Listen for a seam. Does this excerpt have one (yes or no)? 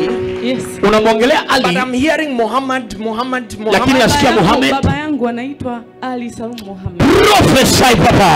no